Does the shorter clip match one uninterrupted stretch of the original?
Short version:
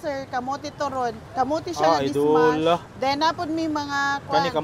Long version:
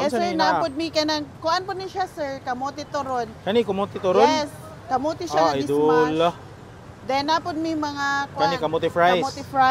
no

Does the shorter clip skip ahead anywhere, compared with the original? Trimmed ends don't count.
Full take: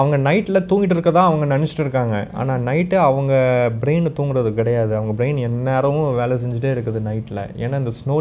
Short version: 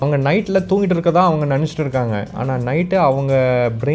no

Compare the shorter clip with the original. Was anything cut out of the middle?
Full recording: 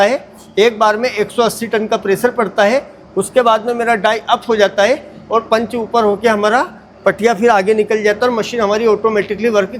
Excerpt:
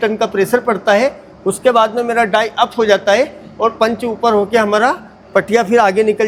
no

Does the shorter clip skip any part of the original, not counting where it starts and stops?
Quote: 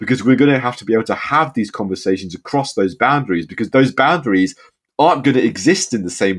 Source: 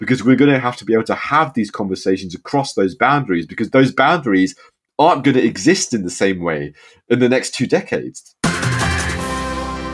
no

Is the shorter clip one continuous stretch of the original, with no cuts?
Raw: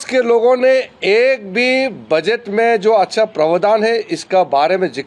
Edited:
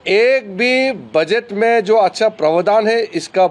yes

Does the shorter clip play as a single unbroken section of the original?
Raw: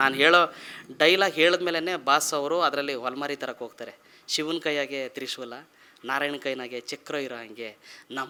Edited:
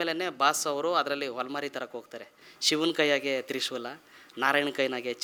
yes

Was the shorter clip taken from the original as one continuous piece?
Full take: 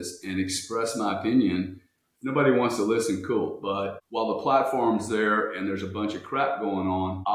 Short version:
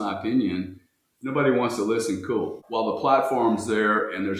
no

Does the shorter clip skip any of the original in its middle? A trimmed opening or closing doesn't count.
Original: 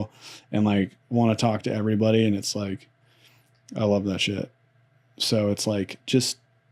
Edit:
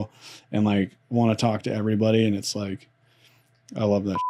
no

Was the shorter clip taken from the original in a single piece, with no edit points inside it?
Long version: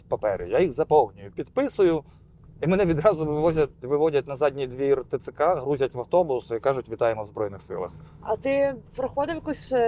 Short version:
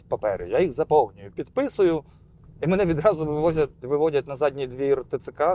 yes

